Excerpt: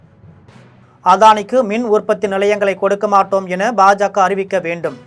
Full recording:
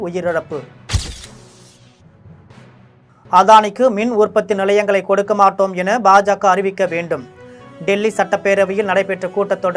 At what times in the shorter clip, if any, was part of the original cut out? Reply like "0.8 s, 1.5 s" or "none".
1.0 s